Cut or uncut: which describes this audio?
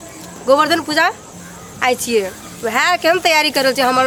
uncut